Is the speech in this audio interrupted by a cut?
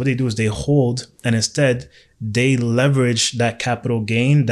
no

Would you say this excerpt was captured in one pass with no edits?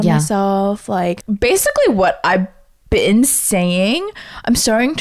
no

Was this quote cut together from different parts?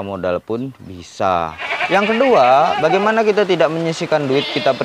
yes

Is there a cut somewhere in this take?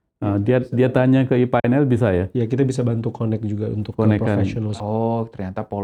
yes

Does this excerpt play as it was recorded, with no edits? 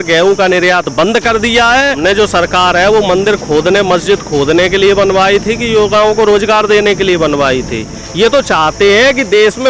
no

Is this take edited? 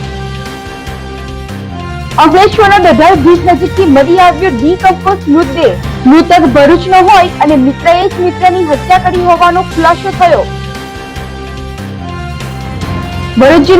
yes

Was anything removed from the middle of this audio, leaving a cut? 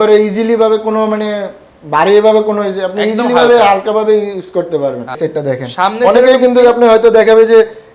yes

